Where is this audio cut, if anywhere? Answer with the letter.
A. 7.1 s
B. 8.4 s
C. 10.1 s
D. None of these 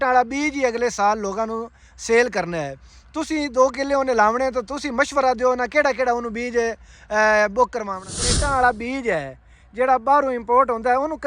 B